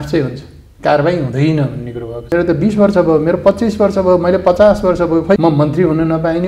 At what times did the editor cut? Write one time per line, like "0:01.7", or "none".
0:02.3
0:05.4